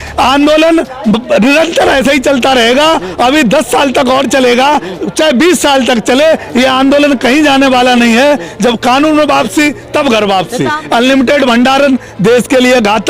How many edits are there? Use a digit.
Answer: 1